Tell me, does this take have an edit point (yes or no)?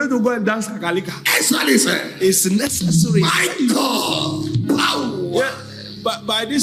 no